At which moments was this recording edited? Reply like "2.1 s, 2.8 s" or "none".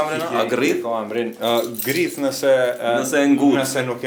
none

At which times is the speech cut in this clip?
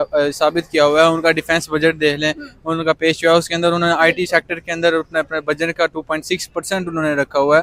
none

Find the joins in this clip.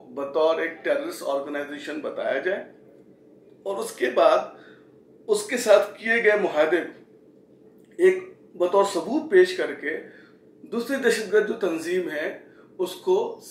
none

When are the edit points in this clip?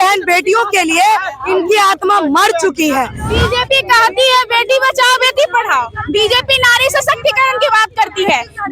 3.2 s

